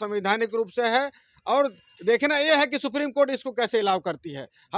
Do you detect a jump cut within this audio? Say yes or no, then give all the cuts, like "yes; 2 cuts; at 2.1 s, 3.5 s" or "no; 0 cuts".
no; 0 cuts